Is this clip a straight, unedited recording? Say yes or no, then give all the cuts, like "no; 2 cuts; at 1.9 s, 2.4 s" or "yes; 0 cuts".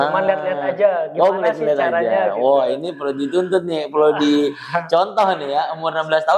yes; 0 cuts